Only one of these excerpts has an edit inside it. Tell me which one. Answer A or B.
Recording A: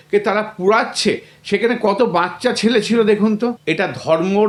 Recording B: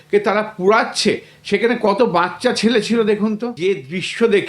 B